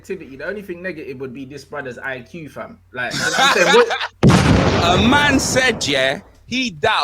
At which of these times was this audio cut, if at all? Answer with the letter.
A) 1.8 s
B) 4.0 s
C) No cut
B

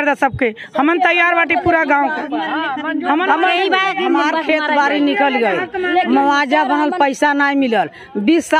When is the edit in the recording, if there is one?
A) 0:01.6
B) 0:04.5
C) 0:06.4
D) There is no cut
D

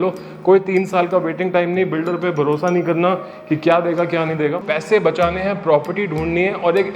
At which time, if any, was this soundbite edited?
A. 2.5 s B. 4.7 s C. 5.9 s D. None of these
B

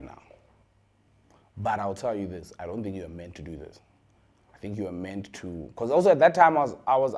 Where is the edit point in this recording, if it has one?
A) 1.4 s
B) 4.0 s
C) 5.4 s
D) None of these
D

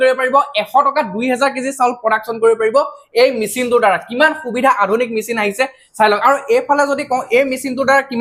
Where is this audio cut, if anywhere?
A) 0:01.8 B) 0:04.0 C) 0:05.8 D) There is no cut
D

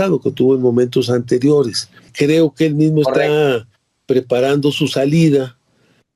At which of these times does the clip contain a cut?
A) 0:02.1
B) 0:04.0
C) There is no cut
A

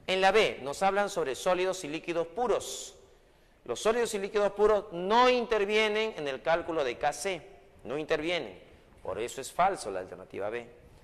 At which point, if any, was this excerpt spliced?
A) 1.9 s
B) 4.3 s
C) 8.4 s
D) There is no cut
A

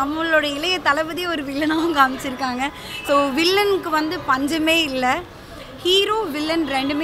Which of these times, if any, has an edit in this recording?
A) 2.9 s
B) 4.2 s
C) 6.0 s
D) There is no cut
D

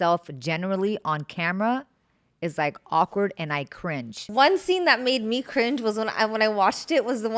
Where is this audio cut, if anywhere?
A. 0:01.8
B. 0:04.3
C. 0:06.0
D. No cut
B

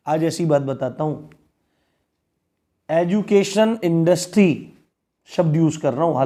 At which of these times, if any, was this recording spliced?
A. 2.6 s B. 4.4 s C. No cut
C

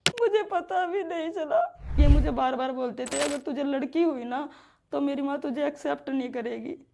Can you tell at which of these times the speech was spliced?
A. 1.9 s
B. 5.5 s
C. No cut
A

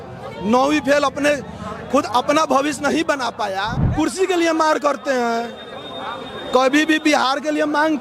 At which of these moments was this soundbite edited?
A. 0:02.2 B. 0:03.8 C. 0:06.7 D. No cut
B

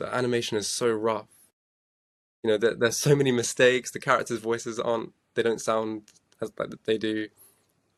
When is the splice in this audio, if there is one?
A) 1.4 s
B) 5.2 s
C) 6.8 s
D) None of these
D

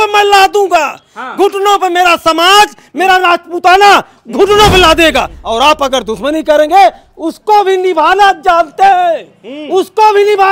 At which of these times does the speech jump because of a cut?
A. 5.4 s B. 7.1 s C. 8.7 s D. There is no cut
A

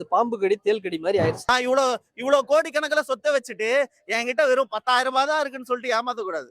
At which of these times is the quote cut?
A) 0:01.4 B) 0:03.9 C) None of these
A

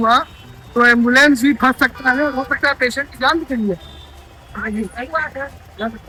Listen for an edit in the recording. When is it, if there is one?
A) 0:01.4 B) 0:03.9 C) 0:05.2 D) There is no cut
D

